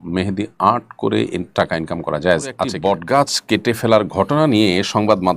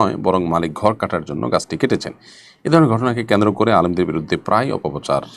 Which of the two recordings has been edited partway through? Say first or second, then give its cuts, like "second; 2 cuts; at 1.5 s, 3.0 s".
first; 1 cut; at 2.6 s